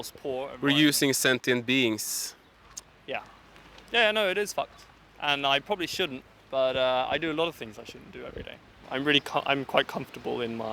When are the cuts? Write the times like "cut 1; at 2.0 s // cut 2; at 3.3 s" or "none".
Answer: cut 1; at 8.9 s